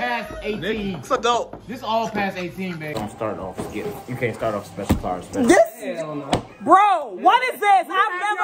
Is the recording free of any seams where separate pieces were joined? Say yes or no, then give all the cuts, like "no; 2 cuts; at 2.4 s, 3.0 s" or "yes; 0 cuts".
no; 1 cut; at 3.0 s